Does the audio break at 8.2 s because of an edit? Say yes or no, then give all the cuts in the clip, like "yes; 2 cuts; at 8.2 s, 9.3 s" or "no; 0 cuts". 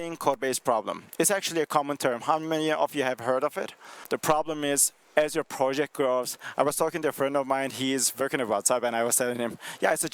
yes; 2 cuts; at 3.9 s, 8.2 s